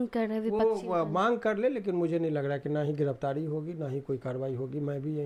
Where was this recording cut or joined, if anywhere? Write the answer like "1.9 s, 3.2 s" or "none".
none